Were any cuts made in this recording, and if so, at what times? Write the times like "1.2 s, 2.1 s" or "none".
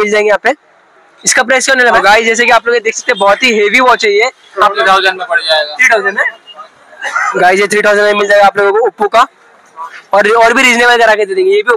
1.8 s, 4.7 s

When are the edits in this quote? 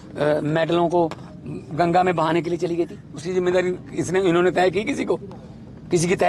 5.0 s

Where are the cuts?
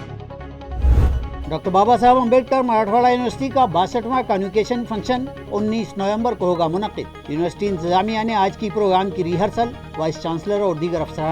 1.0 s

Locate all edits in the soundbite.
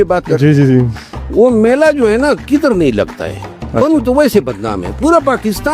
none

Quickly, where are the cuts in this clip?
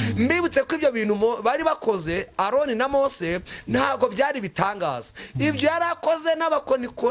none

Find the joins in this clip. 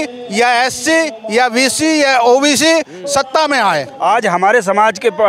3.9 s

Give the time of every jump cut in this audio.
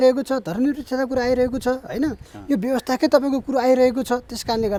none

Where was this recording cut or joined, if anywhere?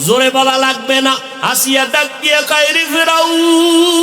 1.3 s

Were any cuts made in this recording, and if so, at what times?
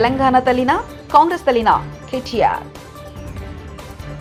none

